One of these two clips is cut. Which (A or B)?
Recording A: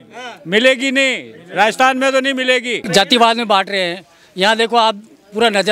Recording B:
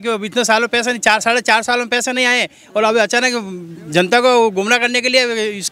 A